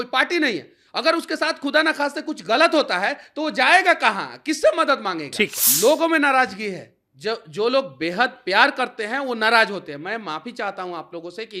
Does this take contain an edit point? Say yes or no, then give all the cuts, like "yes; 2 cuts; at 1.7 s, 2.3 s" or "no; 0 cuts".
yes; 1 cut; at 5.6 s